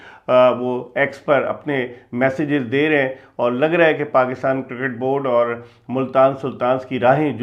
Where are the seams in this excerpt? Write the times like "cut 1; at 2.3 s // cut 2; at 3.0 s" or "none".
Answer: none